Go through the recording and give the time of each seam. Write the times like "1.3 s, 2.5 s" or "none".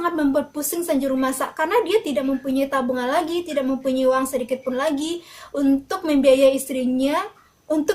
none